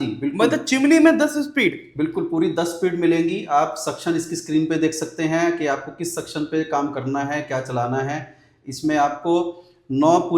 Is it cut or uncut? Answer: uncut